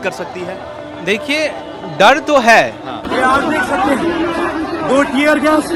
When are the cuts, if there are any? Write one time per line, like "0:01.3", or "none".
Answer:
0:03.0